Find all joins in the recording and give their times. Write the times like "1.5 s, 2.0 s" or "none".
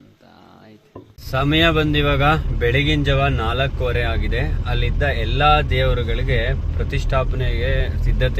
none